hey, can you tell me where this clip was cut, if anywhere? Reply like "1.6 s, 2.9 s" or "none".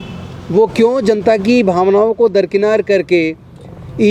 none